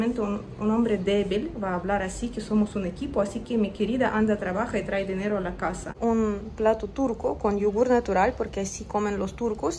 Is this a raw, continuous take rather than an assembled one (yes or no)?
no